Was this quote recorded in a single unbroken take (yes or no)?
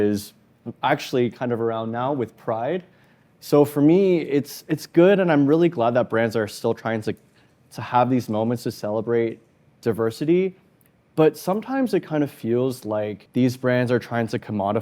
no